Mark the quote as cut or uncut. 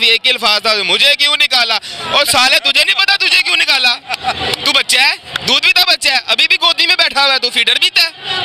uncut